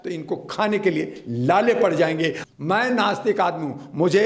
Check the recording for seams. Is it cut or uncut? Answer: cut